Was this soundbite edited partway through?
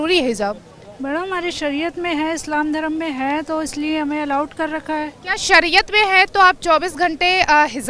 no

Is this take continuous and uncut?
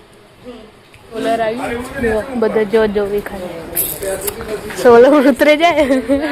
no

